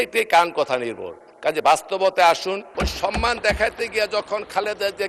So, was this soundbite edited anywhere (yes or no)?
yes